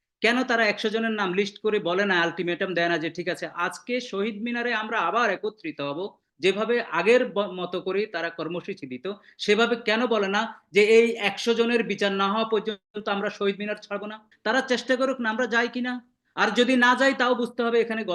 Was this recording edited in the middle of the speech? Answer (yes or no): yes